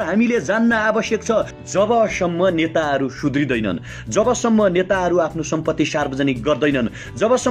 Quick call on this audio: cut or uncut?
cut